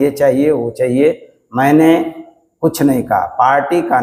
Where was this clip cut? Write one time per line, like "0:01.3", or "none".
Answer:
none